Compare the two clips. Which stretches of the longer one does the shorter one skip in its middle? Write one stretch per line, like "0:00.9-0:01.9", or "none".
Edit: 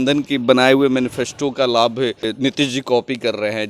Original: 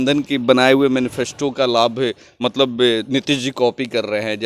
0:02.3-0:03.0

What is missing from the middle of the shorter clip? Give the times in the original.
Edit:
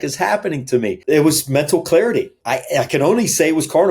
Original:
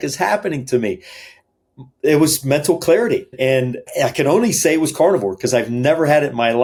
0:01.0-0:01.9
0:03.4-0:03.7

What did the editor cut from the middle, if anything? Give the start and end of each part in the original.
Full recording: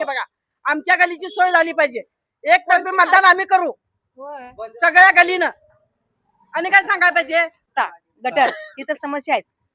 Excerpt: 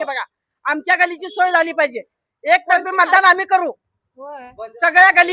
none

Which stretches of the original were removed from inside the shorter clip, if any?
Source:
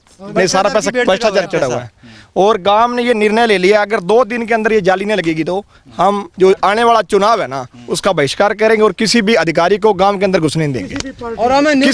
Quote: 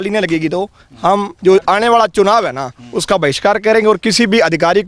none

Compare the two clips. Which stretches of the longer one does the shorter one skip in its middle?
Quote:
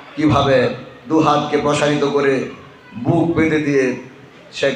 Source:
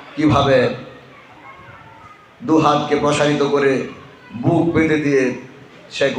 0:00.9-0:02.3

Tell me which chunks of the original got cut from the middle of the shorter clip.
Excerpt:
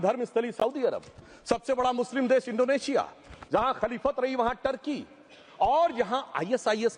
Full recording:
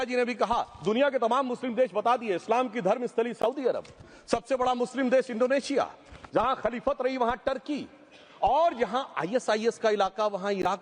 none

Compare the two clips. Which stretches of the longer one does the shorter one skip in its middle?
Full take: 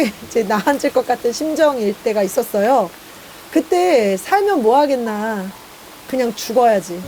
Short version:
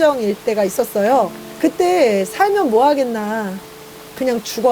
0:03.0-0:03.3

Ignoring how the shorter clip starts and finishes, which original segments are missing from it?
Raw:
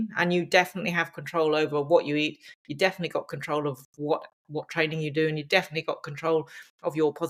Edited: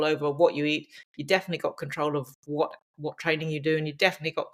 none

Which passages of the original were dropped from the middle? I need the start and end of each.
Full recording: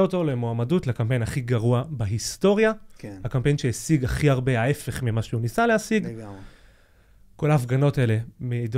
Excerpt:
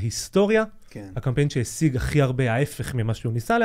none

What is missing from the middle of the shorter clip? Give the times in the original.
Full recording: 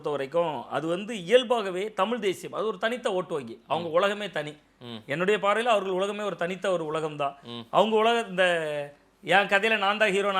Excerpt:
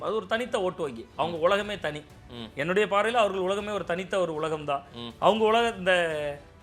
none

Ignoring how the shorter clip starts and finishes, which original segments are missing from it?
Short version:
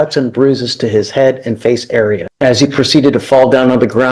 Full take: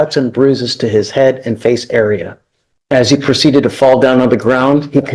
0:02.3-0:02.8

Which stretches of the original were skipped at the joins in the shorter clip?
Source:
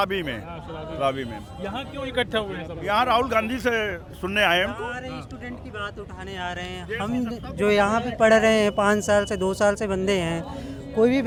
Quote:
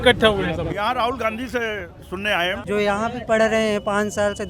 0:04.7-0:07.5

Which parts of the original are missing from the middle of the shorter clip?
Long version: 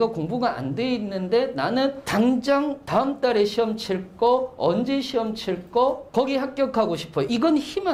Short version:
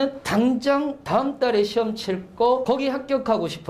0:04.4-0:06.1

